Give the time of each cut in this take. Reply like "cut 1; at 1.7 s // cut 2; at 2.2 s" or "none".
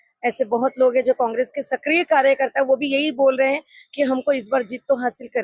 none

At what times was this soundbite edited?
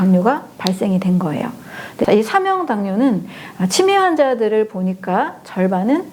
cut 1; at 2.0 s

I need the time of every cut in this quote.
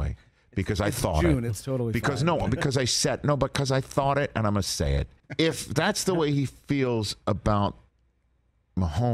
cut 1; at 5.1 s

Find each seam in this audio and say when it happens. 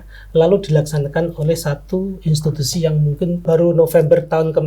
cut 1; at 3.4 s

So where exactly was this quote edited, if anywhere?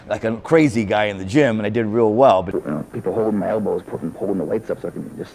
cut 1; at 2.5 s

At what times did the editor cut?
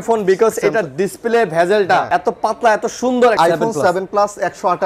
cut 1; at 3.4 s

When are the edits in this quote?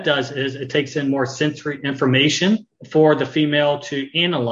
cut 1; at 2.8 s

